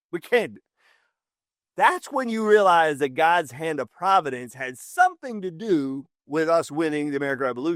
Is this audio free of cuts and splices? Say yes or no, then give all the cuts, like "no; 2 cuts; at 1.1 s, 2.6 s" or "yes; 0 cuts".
yes; 0 cuts